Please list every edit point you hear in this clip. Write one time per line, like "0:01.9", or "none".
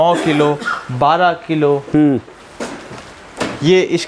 none